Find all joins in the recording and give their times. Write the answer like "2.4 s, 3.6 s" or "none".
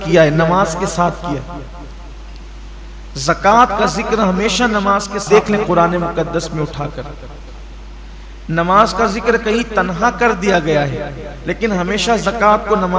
5.2 s